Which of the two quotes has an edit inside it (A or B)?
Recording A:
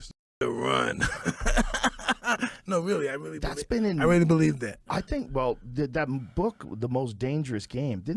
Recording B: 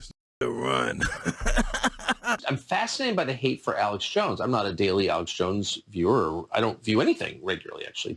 B